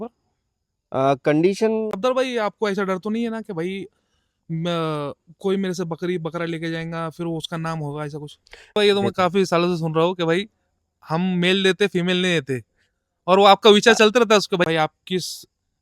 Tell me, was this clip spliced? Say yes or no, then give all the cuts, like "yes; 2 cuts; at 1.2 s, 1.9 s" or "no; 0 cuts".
yes; 3 cuts; at 1.9 s, 8.8 s, 14.7 s